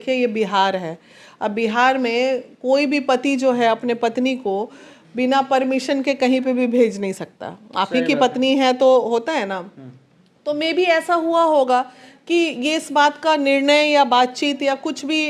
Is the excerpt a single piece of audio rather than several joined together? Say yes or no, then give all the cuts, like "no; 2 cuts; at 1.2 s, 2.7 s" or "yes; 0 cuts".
yes; 0 cuts